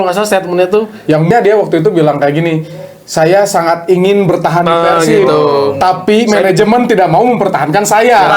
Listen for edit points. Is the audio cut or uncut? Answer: cut